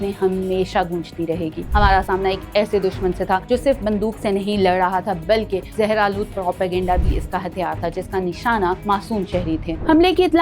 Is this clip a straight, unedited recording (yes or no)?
no